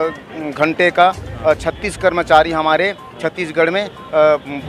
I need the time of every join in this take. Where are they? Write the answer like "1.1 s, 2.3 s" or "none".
none

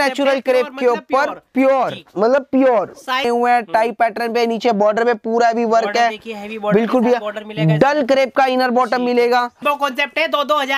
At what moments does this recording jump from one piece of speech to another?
3.2 s, 9.6 s

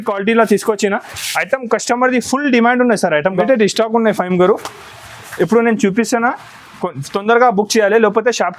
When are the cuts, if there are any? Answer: 3.4 s

